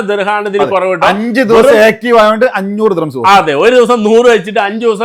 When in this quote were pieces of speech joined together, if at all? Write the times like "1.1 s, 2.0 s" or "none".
none